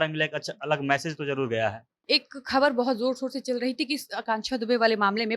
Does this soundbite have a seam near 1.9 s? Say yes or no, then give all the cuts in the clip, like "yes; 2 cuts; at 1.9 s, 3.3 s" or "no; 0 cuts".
yes; 1 cut; at 1.9 s